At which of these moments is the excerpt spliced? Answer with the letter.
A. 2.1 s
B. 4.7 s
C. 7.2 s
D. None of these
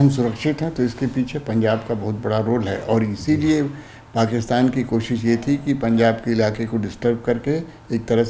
D